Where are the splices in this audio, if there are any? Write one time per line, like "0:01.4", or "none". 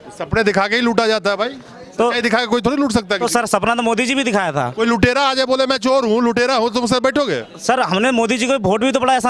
none

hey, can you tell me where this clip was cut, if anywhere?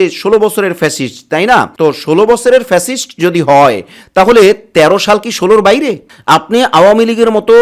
0:06.0

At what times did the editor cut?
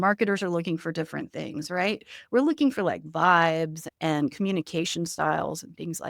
0:03.8

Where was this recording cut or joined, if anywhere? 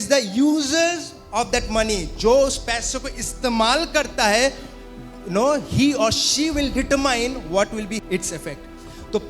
0:08.0

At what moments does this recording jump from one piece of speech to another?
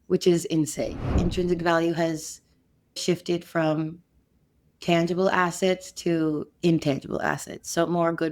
0:01.0

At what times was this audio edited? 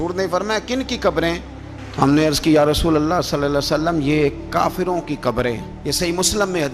none

